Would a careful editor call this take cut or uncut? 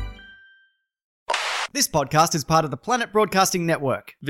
cut